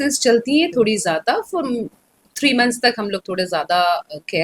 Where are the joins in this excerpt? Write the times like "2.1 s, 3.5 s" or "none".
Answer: none